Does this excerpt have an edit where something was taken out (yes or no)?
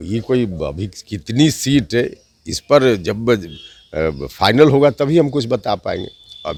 no